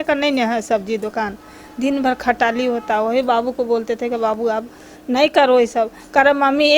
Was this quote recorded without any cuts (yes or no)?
yes